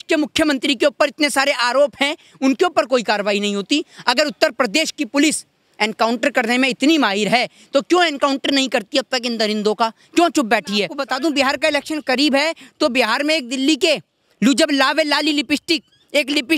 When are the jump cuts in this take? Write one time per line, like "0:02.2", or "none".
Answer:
0:11.0